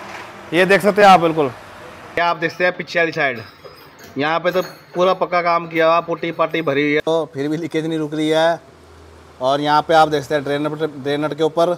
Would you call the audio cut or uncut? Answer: cut